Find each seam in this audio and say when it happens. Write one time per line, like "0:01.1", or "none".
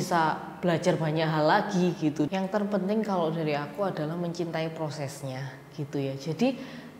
0:02.3